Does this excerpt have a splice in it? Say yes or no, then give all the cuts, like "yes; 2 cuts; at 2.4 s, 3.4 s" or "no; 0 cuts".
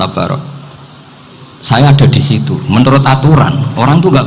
no; 0 cuts